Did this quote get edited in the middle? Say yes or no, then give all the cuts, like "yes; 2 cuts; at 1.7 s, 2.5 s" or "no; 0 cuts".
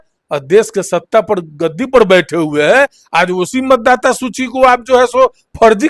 no; 0 cuts